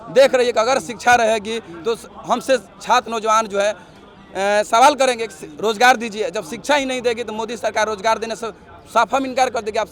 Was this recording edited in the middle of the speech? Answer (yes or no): no